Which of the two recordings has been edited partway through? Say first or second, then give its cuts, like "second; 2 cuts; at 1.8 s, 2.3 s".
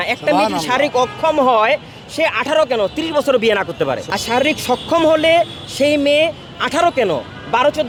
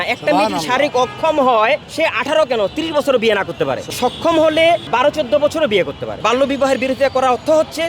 second; 4 cuts; at 1.9 s, 3.9 s, 4.9 s, 6.1 s